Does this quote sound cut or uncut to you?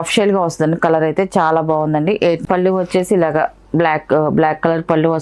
cut